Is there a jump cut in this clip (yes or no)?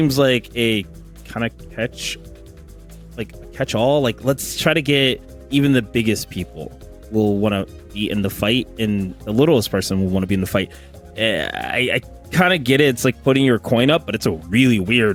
no